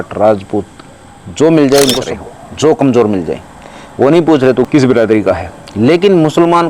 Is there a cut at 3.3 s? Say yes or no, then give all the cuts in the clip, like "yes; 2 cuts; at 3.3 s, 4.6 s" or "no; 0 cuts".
no; 2 cuts; at 2.1 s, 4.6 s